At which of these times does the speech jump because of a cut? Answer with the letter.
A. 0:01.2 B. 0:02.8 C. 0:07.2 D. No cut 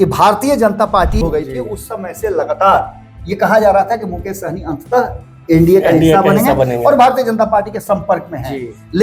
A